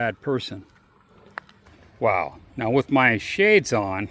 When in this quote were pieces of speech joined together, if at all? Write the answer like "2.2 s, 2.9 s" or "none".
1.8 s